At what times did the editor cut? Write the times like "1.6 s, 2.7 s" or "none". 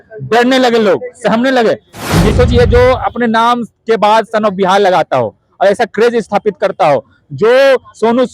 2.3 s

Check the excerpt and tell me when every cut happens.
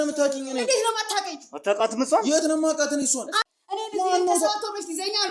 3.4 s

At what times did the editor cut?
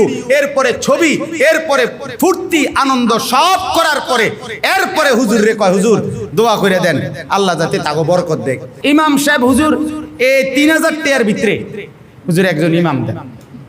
8.9 s

